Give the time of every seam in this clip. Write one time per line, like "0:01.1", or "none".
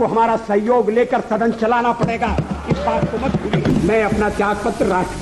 0:03.7